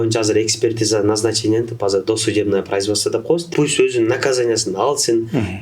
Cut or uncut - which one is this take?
cut